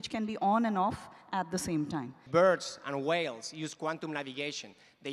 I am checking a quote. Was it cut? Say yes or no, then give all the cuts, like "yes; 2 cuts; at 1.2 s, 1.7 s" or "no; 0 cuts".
yes; 1 cut; at 2.2 s